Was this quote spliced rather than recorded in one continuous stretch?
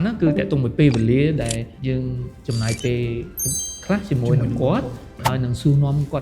yes; 1 cut; at 1.7 s

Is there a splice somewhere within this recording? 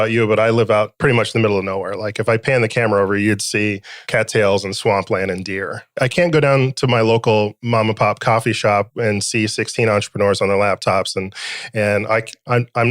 yes; 3 cuts; at 0.9 s, 3.9 s, 5.9 s

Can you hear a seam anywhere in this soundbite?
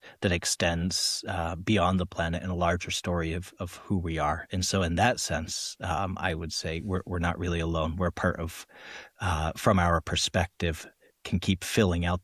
no; 0 cuts

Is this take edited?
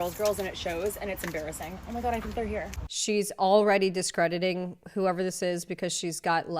yes; 1 cut; at 2.7 s

